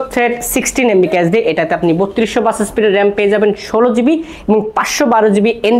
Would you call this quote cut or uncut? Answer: uncut